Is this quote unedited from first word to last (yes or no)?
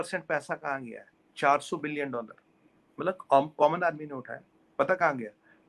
yes